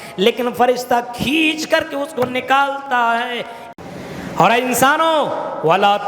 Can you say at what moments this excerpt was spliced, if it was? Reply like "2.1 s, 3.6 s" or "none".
3.6 s